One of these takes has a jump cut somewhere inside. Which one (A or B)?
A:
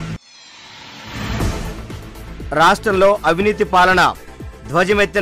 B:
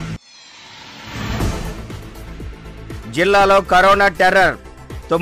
B